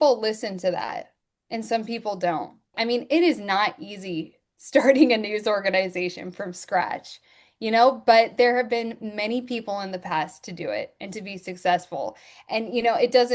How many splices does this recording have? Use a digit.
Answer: 1